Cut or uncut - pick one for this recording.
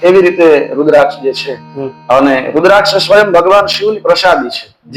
uncut